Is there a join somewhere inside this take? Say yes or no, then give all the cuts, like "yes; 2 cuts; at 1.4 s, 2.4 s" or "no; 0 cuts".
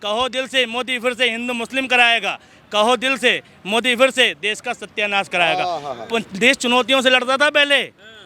no; 0 cuts